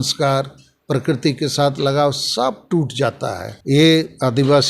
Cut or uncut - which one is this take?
cut